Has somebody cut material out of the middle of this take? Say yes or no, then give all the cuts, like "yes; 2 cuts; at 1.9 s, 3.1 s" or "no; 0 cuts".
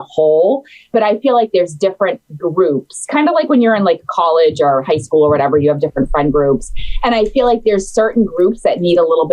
no; 0 cuts